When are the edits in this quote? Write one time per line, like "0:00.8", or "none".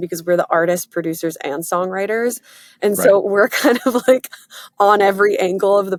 none